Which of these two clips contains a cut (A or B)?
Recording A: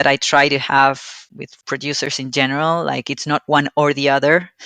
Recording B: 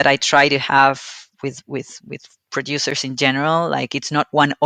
A